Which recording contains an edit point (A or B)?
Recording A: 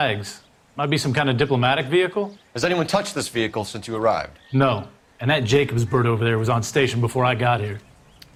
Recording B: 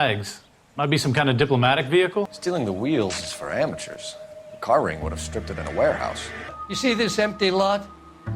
B